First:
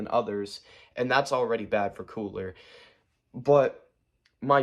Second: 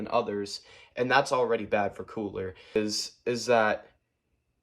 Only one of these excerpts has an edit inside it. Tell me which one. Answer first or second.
second